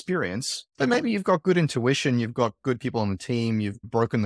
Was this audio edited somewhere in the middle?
no; 0 cuts

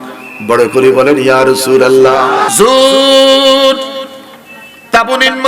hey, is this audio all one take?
no; 1 cut; at 2.5 s

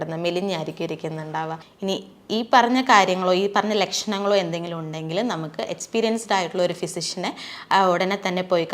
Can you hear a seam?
yes; 1 cut; at 1.6 s

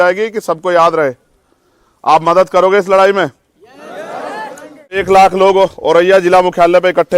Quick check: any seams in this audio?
yes; 1 cut; at 5.0 s

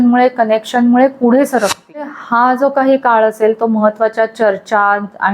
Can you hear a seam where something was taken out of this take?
yes; 1 cut; at 2.1 s

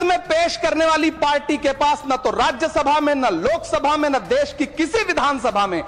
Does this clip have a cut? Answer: no; 0 cuts

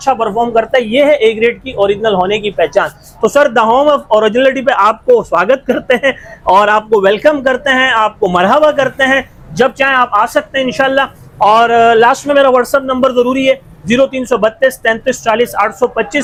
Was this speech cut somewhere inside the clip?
no; 0 cuts

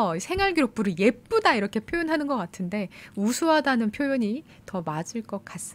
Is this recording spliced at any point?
no; 0 cuts

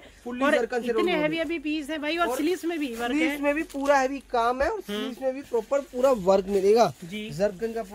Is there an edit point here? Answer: no; 0 cuts

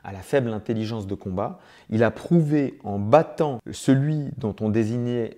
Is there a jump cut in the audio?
yes; 1 cut; at 3.7 s

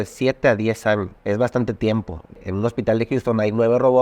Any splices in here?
yes; 2 cuts; at 1.2 s, 2.4 s

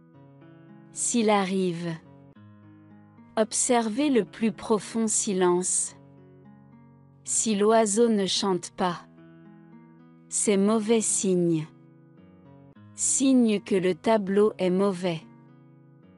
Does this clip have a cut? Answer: yes; 3 cuts; at 11.7 s, 13.1 s, 15.2 s

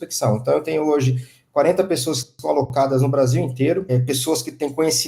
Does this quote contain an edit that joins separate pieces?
yes; 1 cut; at 3.9 s

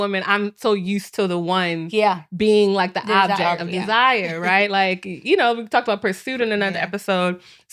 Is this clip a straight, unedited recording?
yes; 0 cuts

